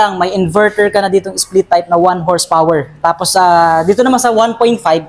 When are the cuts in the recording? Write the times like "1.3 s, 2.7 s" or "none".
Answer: none